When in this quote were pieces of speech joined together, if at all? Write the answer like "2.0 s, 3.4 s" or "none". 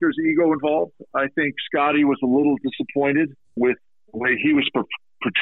3.4 s